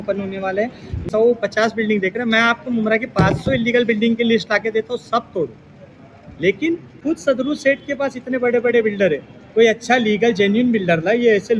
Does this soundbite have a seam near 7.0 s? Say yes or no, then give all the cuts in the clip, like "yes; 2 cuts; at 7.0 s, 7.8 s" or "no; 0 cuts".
yes; 2 cuts; at 1.1 s, 7.0 s